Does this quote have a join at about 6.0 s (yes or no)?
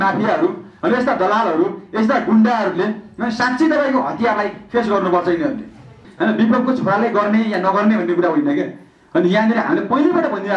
yes